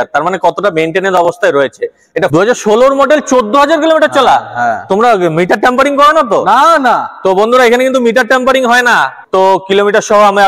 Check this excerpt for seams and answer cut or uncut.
cut